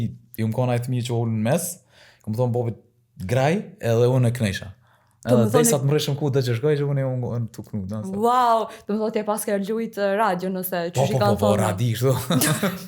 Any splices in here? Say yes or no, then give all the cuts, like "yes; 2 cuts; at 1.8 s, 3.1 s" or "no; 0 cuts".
no; 0 cuts